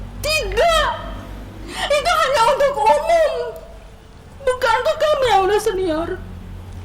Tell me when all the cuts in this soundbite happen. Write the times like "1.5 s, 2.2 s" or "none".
none